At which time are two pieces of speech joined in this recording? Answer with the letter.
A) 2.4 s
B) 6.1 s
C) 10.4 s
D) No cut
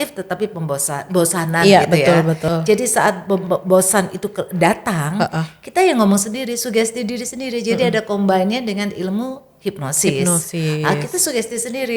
A